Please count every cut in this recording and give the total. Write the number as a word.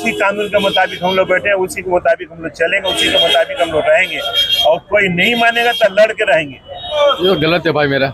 one